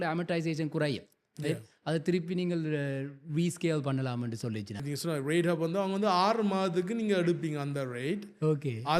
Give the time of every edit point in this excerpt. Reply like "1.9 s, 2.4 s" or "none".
4.8 s